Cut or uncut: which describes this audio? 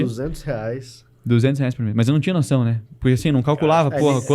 uncut